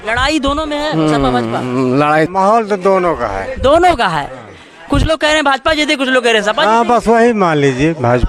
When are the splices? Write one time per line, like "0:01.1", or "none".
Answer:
0:02.3

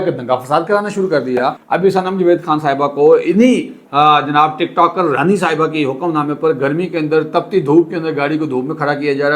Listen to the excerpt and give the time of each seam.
0:01.6

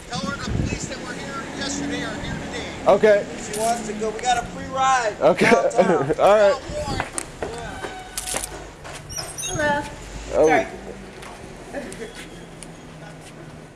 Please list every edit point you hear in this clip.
none

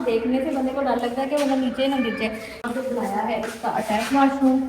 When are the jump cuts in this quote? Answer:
0:02.5

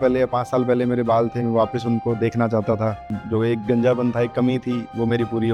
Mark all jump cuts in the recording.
0:03.1

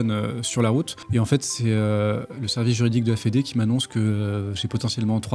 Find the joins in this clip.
0:01.0

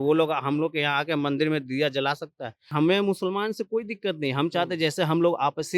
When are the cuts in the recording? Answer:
0:02.7

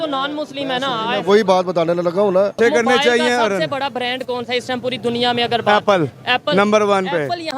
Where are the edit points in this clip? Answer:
0:02.5

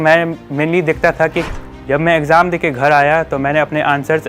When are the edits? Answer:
0:01.5

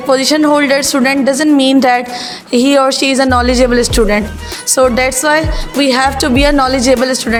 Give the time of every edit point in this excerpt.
none

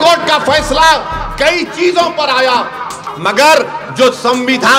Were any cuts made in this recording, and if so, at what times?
0:03.0

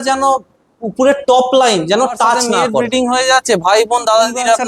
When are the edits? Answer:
0:02.8

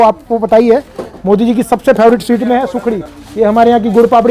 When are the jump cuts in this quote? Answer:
none

